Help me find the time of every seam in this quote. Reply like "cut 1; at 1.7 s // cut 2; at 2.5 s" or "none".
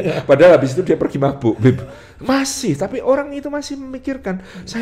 none